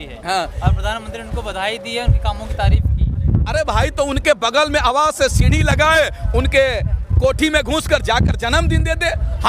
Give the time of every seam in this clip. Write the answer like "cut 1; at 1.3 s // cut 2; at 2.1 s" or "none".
none